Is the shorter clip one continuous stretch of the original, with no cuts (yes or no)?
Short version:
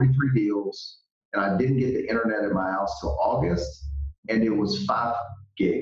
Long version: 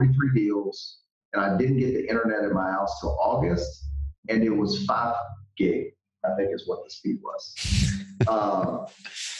yes